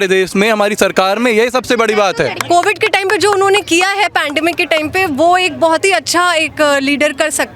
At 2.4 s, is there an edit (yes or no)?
yes